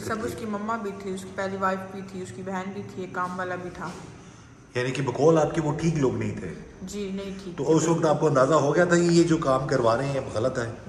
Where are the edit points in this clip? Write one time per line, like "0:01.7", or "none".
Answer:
none